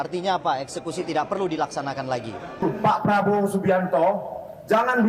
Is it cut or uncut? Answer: cut